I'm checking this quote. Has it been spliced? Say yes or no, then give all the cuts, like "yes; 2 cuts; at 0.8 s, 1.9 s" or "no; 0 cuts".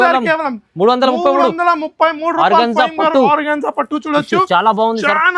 no; 0 cuts